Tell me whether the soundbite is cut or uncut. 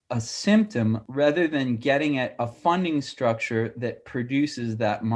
cut